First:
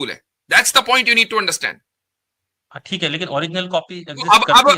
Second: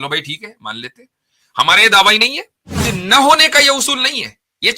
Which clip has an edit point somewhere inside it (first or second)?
second